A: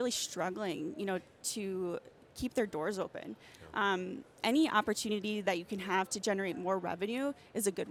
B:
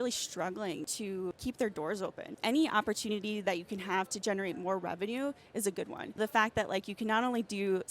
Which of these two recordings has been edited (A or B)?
B